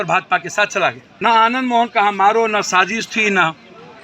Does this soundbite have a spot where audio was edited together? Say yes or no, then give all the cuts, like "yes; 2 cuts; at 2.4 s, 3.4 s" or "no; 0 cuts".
yes; 1 cut; at 1.1 s